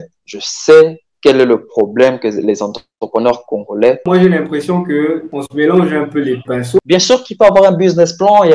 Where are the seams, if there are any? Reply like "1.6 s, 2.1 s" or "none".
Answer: 4.0 s, 6.8 s